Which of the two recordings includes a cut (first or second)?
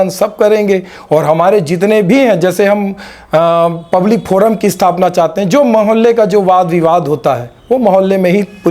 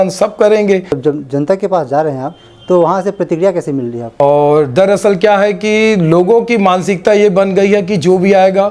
second